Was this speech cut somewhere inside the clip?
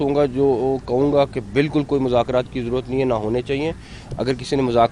no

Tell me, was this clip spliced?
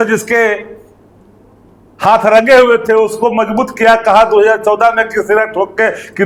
no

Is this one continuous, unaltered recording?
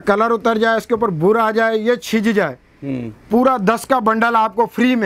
yes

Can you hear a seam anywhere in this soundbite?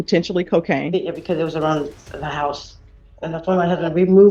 no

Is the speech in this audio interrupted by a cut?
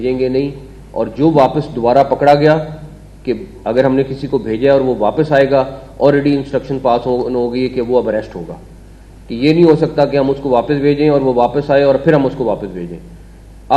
no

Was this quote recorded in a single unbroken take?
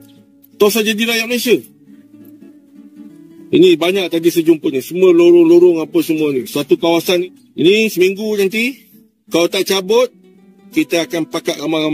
no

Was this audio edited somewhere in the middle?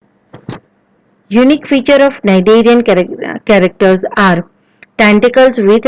yes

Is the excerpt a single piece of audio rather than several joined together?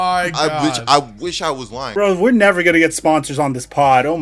no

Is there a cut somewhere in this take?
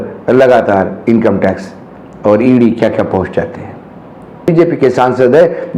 yes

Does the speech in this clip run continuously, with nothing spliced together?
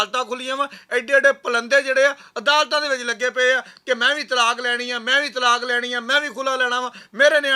yes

